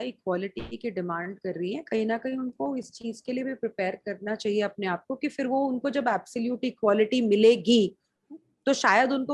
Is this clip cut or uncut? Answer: uncut